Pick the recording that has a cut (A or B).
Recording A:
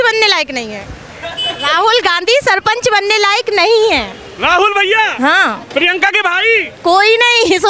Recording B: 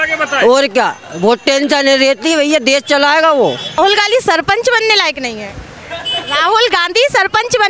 B